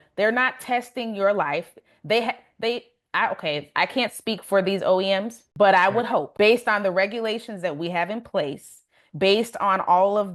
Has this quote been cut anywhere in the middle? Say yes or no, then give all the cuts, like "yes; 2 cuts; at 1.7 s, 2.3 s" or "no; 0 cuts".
yes; 2 cuts; at 5.4 s, 6.3 s